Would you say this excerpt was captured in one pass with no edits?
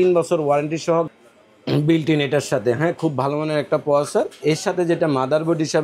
yes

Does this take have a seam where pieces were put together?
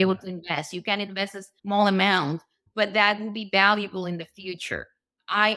yes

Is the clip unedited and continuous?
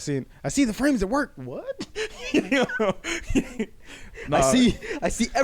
yes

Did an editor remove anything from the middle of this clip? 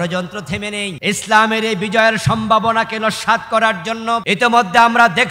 yes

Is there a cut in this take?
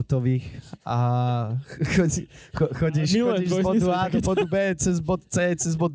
no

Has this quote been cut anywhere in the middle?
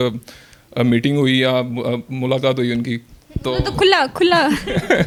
no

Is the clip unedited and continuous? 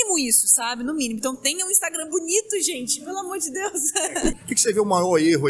no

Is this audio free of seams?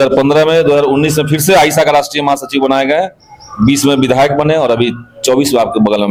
yes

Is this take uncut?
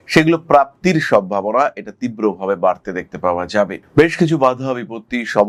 yes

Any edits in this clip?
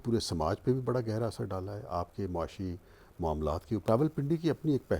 yes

